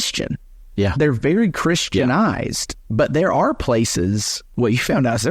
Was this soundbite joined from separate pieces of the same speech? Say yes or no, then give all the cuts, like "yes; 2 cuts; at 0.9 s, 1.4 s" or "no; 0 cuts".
yes; 2 cuts; at 2.6 s, 4.5 s